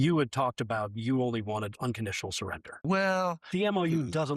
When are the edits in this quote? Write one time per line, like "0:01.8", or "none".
0:02.8